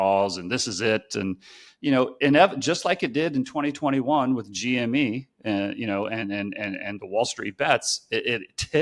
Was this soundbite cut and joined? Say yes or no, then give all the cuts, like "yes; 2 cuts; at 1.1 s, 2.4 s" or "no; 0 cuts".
no; 0 cuts